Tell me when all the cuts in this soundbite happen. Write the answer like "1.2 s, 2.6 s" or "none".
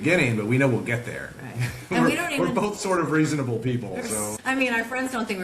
4.3 s